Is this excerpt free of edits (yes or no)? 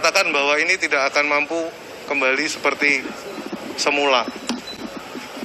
yes